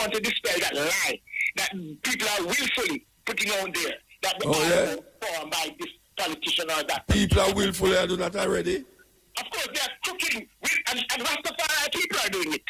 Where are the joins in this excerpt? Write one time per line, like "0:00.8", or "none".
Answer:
none